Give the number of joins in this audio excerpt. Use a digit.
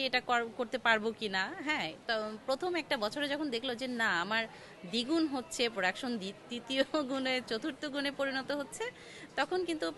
0